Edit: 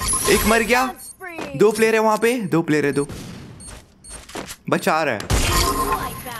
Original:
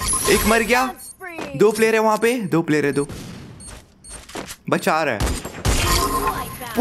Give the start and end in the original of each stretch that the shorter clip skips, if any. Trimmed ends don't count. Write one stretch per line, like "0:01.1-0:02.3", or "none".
0:05.2-0:05.6